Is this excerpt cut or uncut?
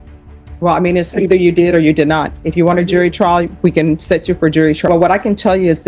cut